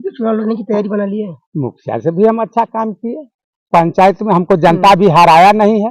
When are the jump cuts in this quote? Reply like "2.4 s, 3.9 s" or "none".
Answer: none